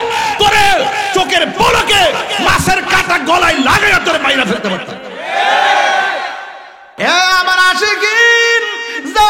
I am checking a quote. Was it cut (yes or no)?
yes